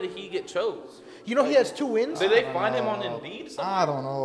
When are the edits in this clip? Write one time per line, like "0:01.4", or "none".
none